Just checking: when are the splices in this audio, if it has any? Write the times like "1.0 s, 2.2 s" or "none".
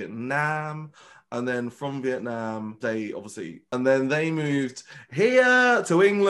2.8 s, 3.7 s